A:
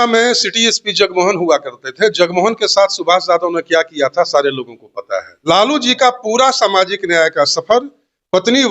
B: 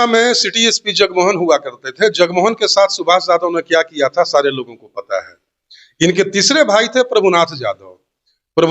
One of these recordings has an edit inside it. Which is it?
A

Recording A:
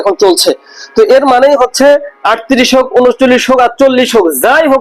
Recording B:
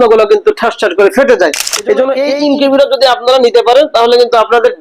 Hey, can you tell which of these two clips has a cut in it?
B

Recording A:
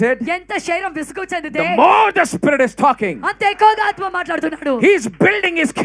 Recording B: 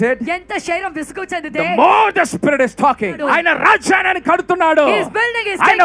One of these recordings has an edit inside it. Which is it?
B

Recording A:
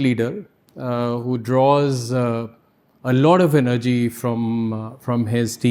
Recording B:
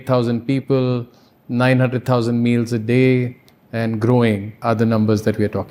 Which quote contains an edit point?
B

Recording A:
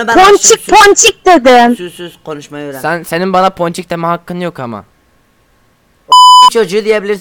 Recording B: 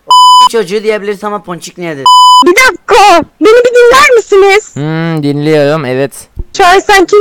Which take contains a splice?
B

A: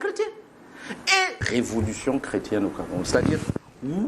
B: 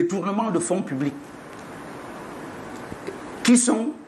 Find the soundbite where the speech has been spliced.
A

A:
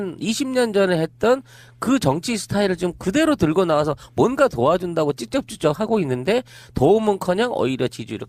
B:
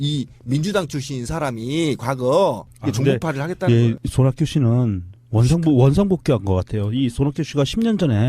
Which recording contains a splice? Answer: B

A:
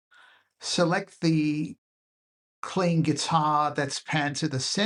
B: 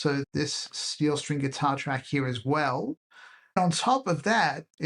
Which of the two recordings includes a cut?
B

